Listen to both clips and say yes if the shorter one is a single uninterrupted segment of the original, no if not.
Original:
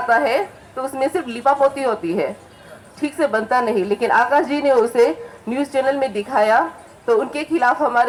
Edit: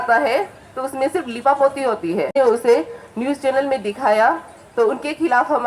no